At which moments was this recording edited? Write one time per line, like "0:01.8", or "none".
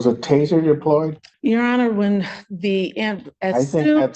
0:01.2